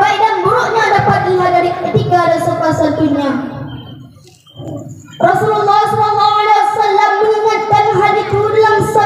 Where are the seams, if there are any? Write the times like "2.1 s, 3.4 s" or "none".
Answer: 4.5 s